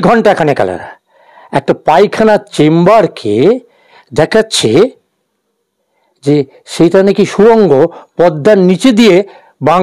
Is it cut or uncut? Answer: uncut